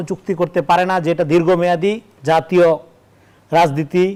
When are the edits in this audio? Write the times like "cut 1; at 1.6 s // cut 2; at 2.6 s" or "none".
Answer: none